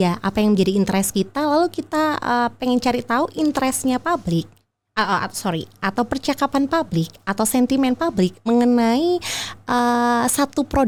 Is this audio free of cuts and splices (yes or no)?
yes